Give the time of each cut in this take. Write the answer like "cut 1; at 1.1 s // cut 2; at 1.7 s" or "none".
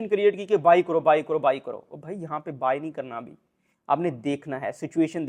none